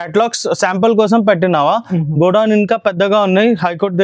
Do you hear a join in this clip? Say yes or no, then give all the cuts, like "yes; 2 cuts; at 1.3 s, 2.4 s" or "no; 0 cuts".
no; 0 cuts